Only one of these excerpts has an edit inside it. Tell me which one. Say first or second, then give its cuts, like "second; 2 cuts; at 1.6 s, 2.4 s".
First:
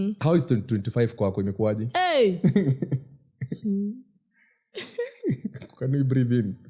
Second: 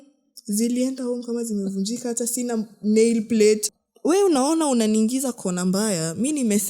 second; 1 cut; at 3.7 s